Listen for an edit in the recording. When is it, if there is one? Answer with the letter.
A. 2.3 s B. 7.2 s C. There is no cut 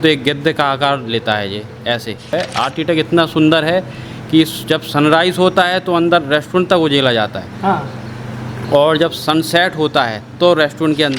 A